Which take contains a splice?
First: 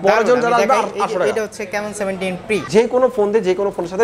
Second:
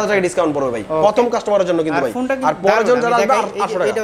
first; 1 cut; at 2.6 s

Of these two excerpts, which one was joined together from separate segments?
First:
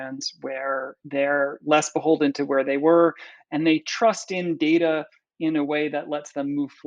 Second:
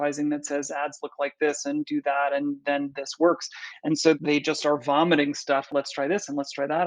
second; 2 cuts; at 4.2 s, 5.7 s

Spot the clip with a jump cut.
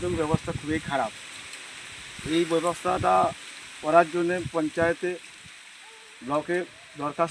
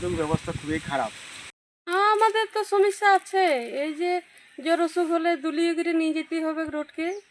second; 1 cut; at 2.1 s

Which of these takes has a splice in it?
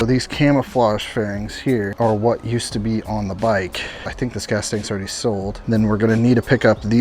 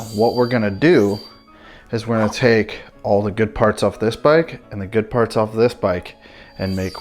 first; 3 cuts; at 1.9 s, 4.1 s, 5.5 s

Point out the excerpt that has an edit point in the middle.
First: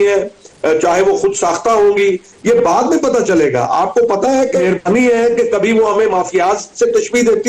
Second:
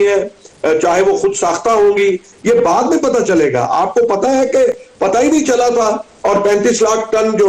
first; 1 cut; at 4.6 s

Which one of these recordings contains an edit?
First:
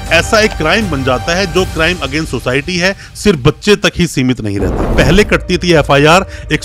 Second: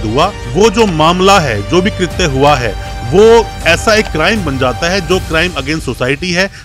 first; 1 cut; at 4.9 s

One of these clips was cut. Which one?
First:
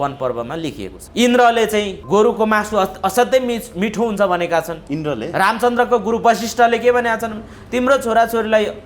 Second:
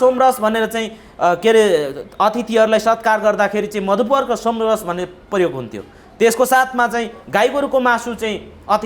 first; 3 cuts; at 1.0 s, 2.0 s, 4.8 s

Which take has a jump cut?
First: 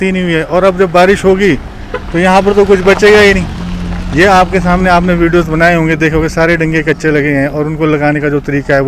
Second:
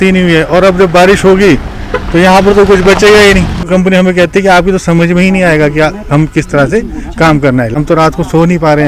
second; 2 cuts; at 3.7 s, 7.7 s

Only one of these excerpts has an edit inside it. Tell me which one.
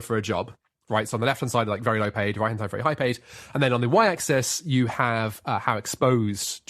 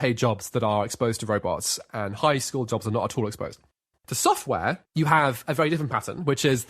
second; 2 cuts; at 3.8 s, 4.8 s

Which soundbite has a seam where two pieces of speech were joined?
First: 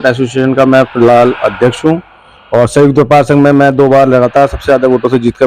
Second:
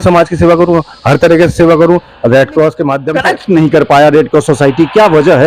second; 1 cut; at 3.1 s

